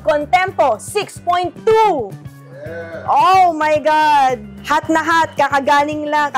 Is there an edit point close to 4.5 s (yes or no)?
no